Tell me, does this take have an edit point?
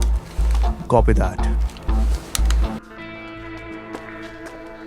yes; 1 cut; at 2.8 s

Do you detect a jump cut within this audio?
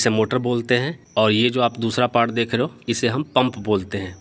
yes; 2 cuts; at 1.0 s, 3.4 s

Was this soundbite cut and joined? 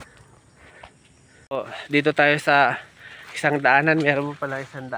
yes; 1 cut; at 1.4 s

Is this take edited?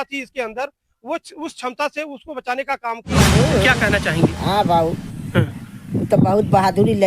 yes; 1 cut; at 3.3 s

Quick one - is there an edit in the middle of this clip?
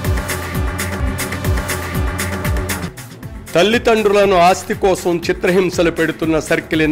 no; 0 cuts

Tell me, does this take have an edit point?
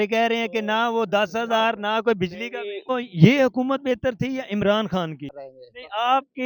yes; 2 cuts; at 2.9 s, 5.3 s

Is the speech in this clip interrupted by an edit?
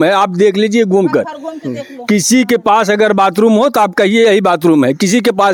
no; 0 cuts

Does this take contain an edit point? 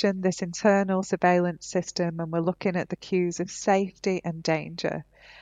no; 0 cuts

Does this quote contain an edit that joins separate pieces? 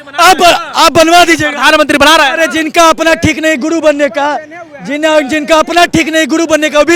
no; 0 cuts

